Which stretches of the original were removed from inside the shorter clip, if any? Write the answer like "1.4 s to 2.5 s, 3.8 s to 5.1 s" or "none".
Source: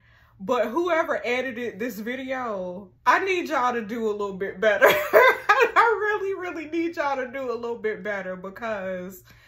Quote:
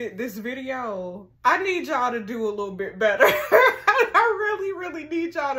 none